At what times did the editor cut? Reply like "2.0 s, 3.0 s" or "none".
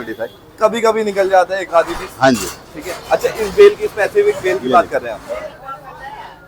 none

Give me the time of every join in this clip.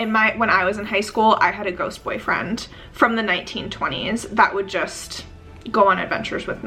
none

